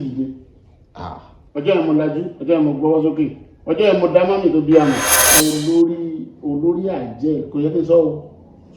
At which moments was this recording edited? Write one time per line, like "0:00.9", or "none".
0:05.3